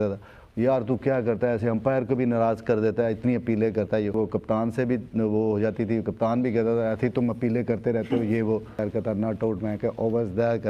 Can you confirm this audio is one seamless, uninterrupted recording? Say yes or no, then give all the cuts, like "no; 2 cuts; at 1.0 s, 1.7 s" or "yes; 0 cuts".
no; 2 cuts; at 4.1 s, 8.7 s